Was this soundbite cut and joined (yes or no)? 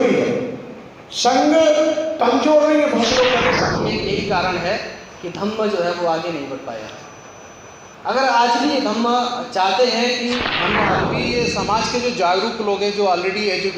yes